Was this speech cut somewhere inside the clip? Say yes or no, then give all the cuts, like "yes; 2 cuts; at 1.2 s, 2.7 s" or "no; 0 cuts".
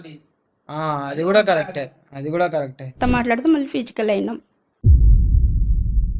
yes; 2 cuts; at 3.0 s, 4.8 s